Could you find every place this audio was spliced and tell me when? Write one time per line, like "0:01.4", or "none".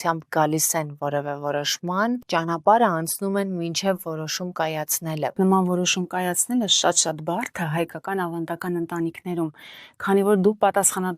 0:02.2
0:05.3